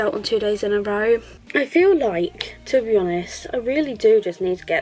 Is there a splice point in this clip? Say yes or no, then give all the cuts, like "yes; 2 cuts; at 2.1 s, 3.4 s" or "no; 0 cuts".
no; 0 cuts